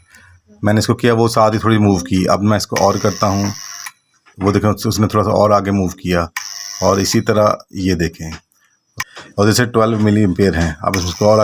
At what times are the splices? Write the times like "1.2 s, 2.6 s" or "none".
8.9 s